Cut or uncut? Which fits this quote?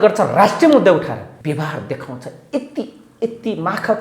cut